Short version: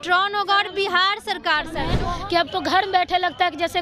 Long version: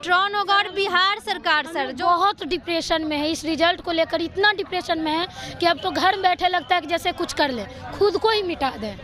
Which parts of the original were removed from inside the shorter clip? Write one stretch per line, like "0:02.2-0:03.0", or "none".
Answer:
0:01.9-0:05.2

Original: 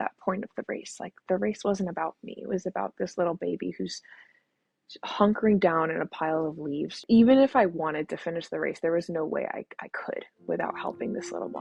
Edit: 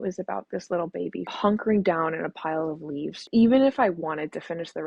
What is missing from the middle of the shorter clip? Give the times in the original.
0:03.7-0:05.0

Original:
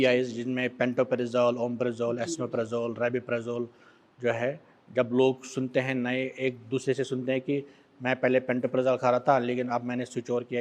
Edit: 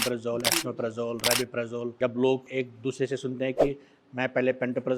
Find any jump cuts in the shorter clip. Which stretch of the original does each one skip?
0:03.7-0:04.9
0:05.4-0:06.3

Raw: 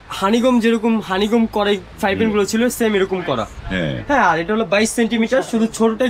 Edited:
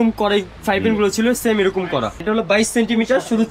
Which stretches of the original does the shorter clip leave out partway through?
0:03.6-0:04.4

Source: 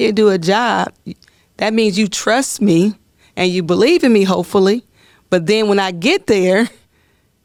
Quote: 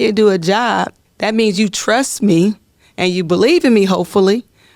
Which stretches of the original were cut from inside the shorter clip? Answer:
0:01.0-0:01.4

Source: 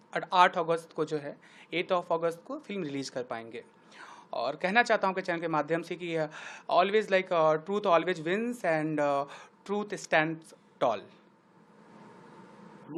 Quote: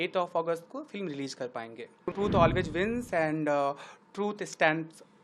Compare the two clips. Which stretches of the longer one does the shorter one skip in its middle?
0:03.9-0:07.6

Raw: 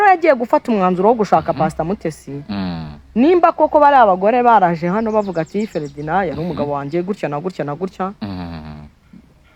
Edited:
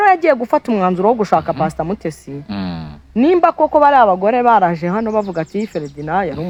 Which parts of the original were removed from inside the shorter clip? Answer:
none

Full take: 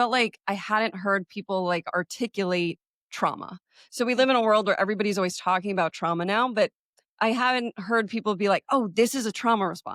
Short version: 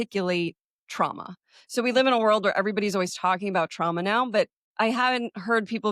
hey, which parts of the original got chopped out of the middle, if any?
0:06.8-0:07.0

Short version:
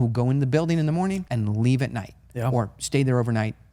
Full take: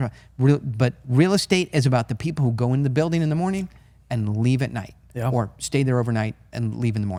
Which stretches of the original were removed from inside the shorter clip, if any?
0:03.7-0:04.1

